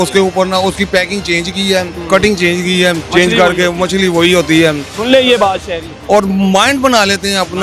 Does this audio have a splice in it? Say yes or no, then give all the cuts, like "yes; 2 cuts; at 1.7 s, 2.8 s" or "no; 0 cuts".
yes; 4 cuts; at 2.0 s, 3.0 s, 4.9 s, 5.9 s